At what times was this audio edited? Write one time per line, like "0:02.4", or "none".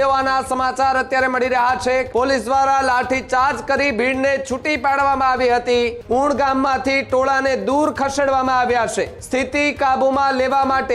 0:02.1
0:06.0
0:09.2